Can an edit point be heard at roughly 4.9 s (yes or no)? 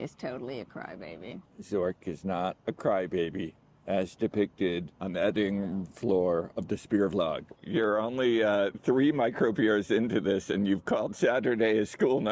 yes